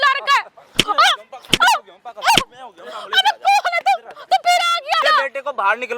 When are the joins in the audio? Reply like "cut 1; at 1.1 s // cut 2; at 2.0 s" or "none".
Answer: cut 1; at 5.0 s